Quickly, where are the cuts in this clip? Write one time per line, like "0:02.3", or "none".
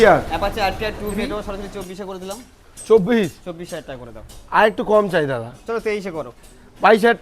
0:01.3

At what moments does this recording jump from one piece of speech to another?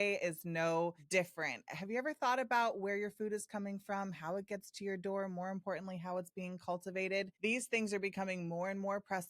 0:01.0
0:07.3

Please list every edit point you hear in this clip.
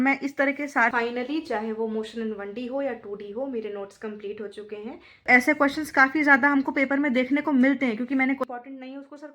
0:00.9
0:05.3
0:08.4

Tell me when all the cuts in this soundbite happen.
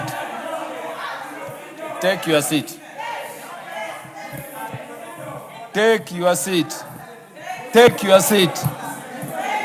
none

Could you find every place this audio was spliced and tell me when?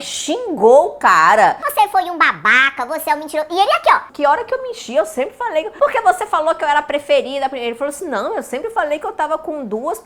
none

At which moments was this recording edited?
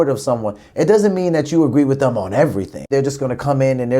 0:02.9

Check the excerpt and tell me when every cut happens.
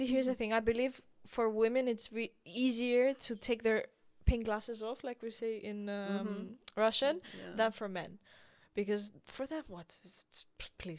none

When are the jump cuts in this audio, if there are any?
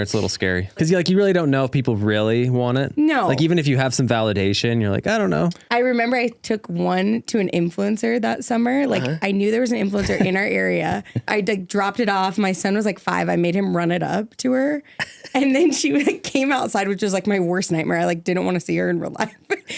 0:00.8
0:05.6
0:11.3

